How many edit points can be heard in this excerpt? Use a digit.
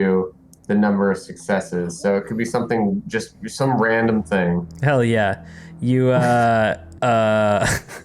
1